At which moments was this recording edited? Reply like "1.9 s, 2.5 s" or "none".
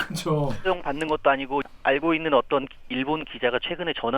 1.7 s